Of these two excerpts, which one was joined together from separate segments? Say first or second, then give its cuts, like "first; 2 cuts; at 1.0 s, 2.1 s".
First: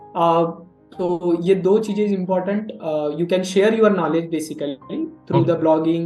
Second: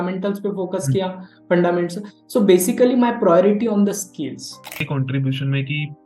second; 1 cut; at 4.8 s